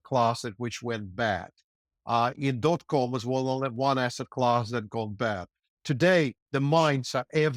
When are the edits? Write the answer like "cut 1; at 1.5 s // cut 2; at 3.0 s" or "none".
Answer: none